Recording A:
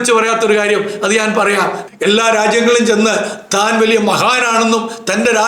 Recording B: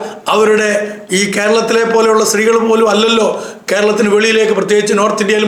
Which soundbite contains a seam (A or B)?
A